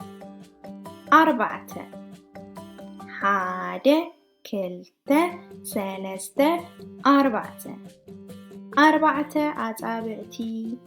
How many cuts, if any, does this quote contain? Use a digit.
1